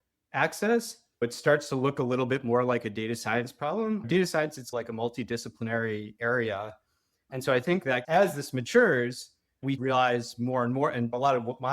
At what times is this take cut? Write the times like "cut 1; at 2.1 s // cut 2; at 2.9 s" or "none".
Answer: cut 1; at 4.0 s // cut 2; at 8.0 s

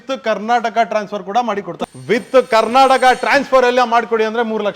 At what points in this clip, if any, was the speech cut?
cut 1; at 1.7 s

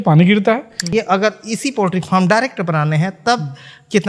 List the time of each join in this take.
cut 1; at 0.9 s

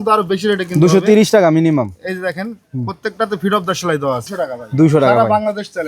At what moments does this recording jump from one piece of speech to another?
cut 1; at 4.2 s

